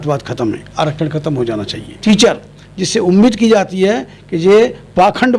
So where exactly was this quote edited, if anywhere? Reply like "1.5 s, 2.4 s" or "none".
2.0 s

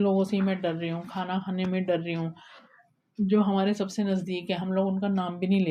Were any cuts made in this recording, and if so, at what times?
none

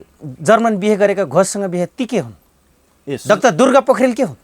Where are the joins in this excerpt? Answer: none

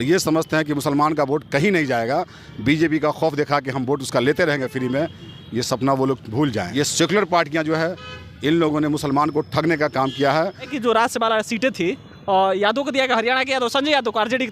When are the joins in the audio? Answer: 6.6 s, 10.7 s

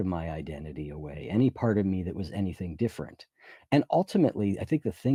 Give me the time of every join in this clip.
none

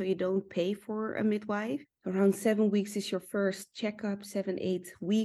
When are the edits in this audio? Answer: 1.9 s

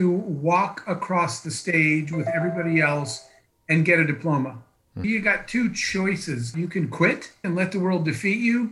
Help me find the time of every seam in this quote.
4.9 s, 6.5 s, 7.4 s

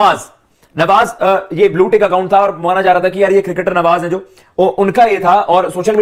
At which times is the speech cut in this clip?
none

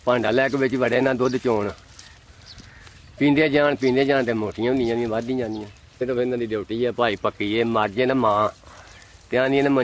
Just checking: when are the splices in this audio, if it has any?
6.0 s

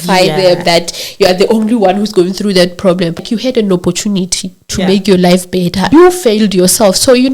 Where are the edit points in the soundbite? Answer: 3.2 s, 5.9 s

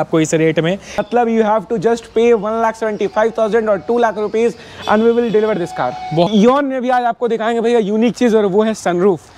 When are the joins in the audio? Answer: 1.0 s, 6.3 s

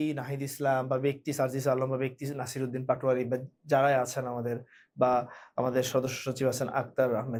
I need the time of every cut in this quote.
none

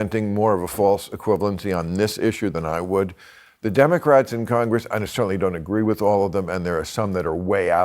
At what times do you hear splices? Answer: none

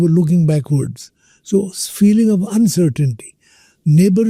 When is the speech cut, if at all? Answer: none

